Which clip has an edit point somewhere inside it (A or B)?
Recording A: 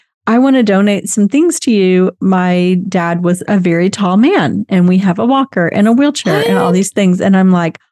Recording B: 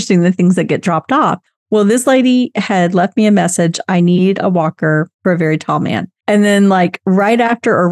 B